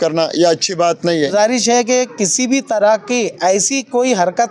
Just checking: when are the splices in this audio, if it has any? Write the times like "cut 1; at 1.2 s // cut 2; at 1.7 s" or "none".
cut 1; at 1.3 s

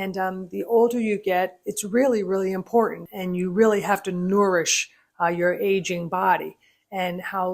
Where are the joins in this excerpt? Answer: cut 1; at 3.1 s

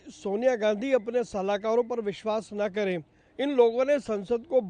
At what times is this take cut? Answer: cut 1; at 3.2 s

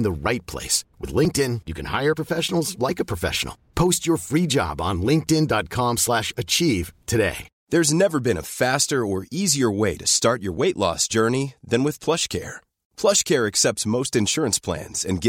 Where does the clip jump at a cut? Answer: cut 1; at 7.5 s

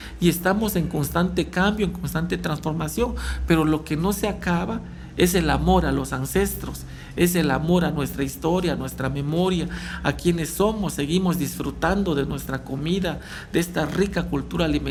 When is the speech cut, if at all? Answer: none

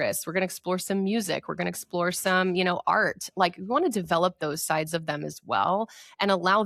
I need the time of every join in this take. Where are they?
none

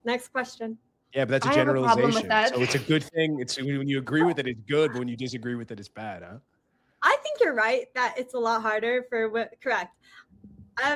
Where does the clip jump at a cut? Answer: none

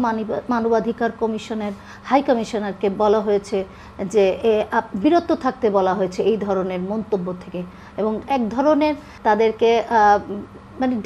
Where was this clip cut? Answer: cut 1; at 8.2 s // cut 2; at 9.1 s

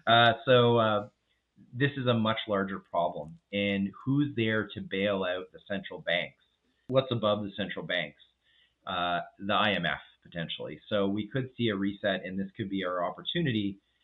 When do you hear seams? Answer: cut 1; at 6.9 s

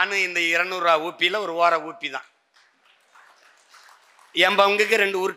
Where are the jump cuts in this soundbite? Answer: none

